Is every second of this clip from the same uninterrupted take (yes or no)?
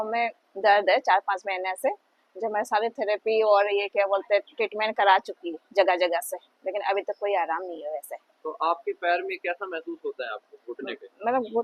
yes